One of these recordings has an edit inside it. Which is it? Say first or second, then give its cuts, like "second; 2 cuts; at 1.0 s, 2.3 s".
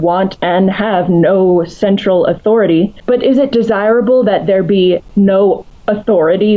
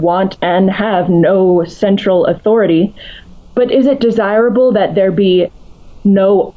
first; 3 cuts; at 3.0 s, 5.1 s, 5.7 s